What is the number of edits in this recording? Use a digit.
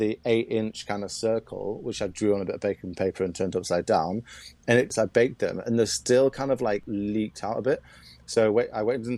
2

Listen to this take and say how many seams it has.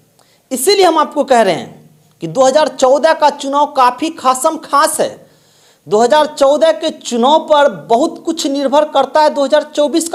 0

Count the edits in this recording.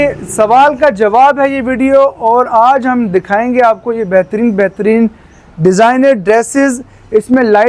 0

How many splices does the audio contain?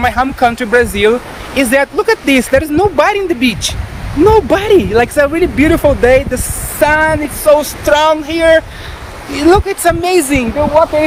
0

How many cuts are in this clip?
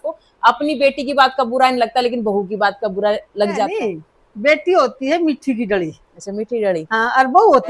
1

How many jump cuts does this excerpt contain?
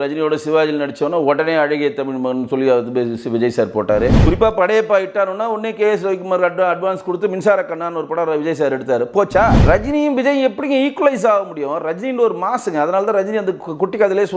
2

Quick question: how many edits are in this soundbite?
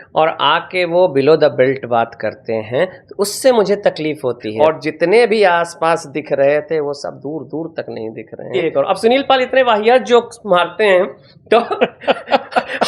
2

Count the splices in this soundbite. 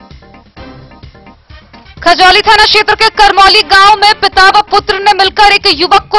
1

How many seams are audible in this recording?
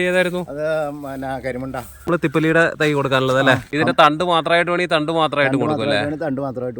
2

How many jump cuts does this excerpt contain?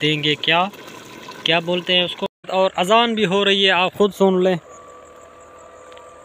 1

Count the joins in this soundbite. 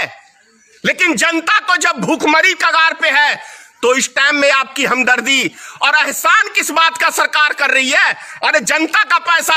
0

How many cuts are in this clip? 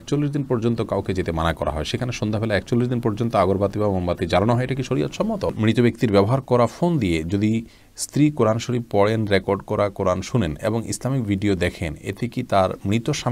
1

